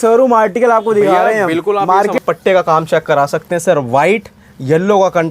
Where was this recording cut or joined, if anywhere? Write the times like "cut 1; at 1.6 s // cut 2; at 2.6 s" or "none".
cut 1; at 2.2 s